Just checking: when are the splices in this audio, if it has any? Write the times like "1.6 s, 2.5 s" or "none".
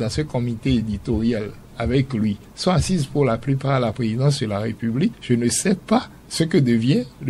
2.5 s, 5.2 s, 6.2 s